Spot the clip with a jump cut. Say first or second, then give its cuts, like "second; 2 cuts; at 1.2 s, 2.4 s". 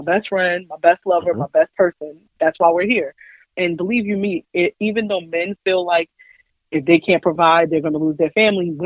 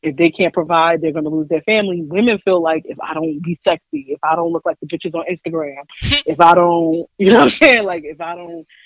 first; 1 cut; at 3.5 s